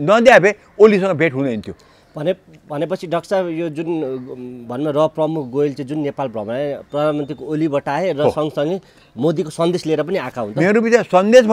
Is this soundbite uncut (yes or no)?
yes